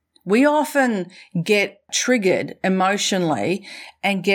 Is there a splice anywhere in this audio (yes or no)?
yes